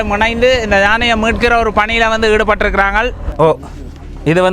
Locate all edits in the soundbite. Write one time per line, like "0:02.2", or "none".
0:03.3